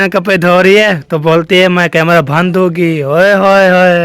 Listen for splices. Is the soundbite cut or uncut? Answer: uncut